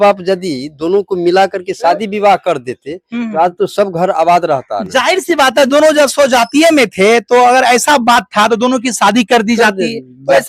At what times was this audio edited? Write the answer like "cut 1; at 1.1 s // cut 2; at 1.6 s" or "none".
none